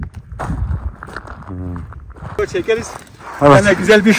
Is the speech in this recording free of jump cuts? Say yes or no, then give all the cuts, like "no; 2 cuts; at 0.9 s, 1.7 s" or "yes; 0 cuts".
no; 1 cut; at 2.4 s